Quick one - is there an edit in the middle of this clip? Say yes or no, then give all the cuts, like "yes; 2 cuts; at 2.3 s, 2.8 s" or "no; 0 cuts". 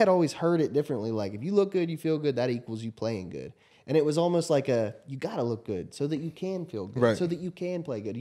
no; 0 cuts